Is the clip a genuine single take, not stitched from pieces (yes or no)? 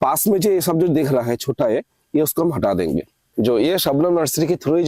no